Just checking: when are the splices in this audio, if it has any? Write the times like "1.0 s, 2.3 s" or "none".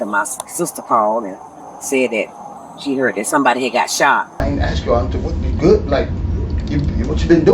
4.4 s